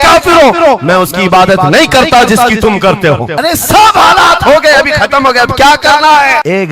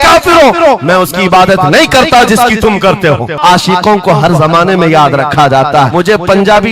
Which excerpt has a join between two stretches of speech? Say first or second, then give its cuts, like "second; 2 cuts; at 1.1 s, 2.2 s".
second; 2 cuts; at 3.4 s, 5.9 s